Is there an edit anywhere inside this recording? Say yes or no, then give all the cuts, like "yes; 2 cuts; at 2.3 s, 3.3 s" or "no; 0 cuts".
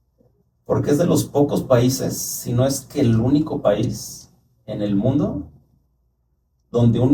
no; 0 cuts